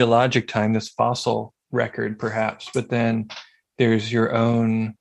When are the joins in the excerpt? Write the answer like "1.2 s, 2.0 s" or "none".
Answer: 1.6 s